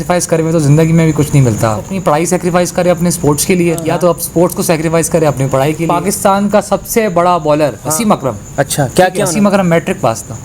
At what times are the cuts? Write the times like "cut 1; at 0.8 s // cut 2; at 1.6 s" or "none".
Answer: cut 1; at 1.9 s // cut 2; at 3.8 s // cut 3; at 5.8 s // cut 4; at 7.8 s // cut 5; at 9.3 s